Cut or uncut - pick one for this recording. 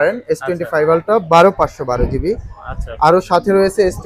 uncut